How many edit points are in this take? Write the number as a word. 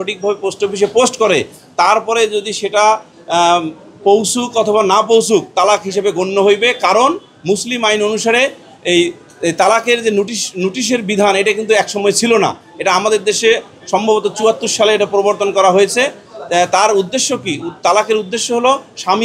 zero